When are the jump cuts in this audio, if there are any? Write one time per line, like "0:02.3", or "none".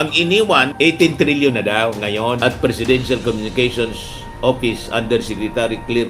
0:02.4